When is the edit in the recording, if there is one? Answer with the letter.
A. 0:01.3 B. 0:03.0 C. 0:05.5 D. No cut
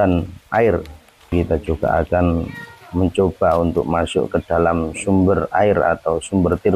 A